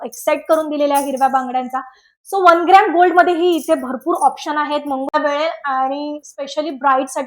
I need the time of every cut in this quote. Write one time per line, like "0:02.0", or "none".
0:05.2